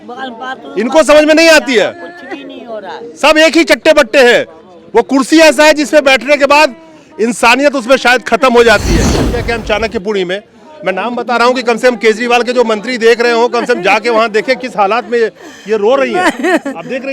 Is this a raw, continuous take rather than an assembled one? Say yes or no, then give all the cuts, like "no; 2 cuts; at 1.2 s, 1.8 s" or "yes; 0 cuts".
no; 1 cut; at 9.1 s